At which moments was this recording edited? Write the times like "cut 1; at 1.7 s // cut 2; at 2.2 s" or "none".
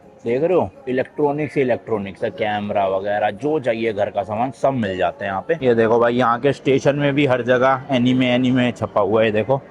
cut 1; at 5.6 s